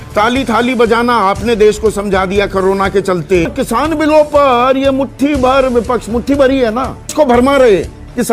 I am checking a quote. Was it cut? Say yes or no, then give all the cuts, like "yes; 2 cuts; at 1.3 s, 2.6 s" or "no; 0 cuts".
yes; 2 cuts; at 3.5 s, 7.1 s